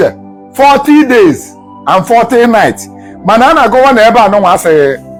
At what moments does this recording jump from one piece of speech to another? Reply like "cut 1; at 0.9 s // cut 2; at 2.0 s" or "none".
none